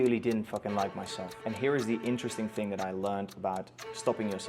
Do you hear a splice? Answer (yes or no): yes